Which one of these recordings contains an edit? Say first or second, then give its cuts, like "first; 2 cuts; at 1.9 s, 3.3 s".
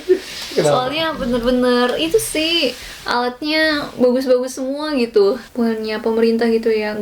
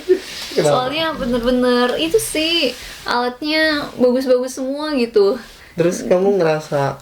first; 1 cut; at 5.5 s